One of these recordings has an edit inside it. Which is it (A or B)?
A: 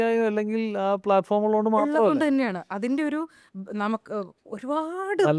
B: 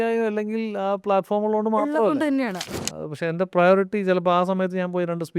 B